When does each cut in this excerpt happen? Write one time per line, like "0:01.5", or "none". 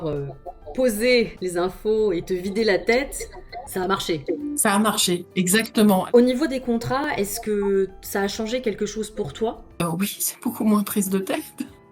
0:06.0